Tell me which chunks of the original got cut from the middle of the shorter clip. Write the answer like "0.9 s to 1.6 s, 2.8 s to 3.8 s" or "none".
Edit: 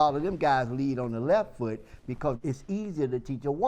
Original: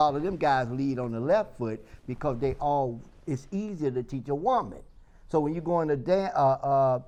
2.4 s to 3.2 s